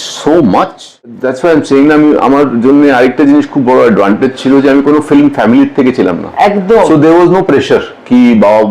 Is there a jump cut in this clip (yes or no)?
yes